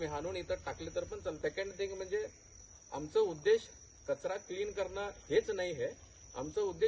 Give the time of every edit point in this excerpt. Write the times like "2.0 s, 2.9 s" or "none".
1.4 s

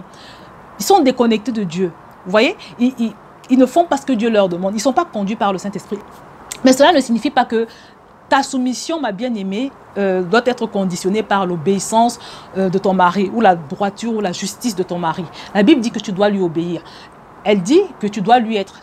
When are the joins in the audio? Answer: 6.0 s

